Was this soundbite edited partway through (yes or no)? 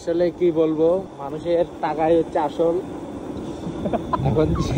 yes